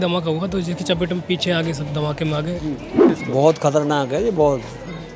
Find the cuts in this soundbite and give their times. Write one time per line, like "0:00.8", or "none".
0:03.1